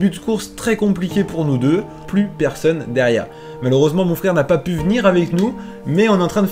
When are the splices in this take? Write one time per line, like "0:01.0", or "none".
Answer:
0:02.1